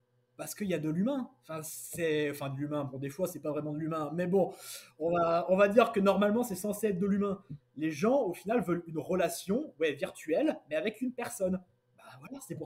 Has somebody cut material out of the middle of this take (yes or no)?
no